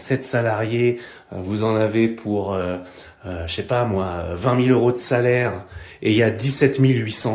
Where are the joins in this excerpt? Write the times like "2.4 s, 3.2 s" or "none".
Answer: none